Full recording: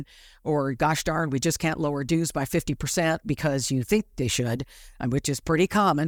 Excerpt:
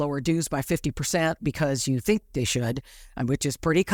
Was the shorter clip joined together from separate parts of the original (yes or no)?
no